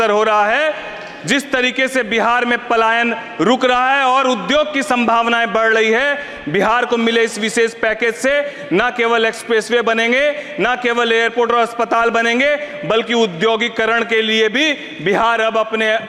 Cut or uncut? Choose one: uncut